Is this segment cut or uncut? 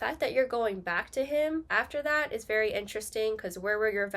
cut